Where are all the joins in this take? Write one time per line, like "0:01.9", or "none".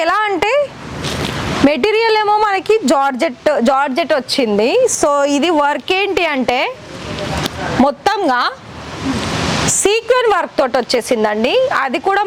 none